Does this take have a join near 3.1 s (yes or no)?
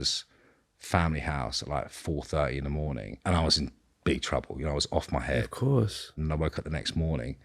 yes